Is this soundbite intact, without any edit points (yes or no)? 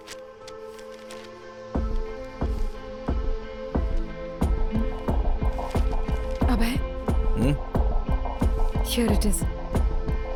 yes